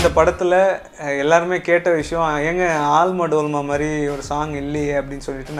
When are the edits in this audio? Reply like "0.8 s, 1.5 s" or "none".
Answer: none